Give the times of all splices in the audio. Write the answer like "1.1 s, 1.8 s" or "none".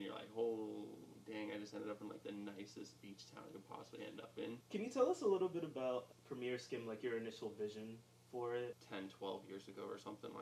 4.6 s, 6.1 s, 8.8 s

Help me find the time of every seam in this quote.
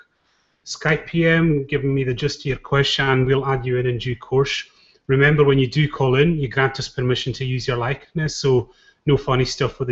none

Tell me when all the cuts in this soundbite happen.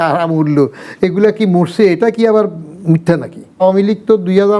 3.6 s

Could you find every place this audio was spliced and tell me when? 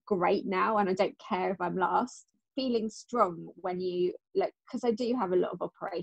2.4 s

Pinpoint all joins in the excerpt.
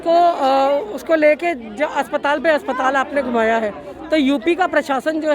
none

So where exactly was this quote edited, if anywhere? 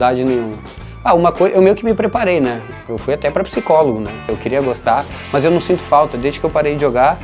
4.1 s

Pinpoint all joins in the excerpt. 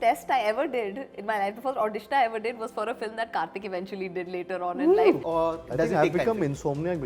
5.2 s

